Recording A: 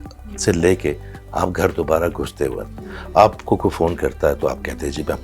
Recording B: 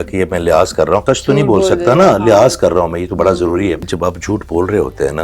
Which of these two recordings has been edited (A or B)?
B